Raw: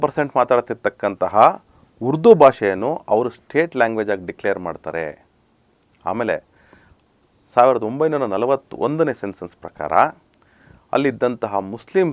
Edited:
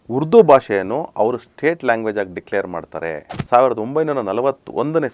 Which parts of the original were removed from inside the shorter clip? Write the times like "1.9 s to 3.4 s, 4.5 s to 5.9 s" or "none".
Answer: 5.2 s to 7.4 s